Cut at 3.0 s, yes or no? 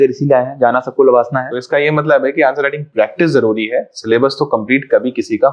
no